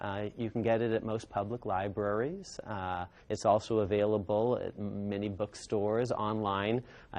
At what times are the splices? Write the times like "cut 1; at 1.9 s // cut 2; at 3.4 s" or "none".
cut 1; at 4.2 s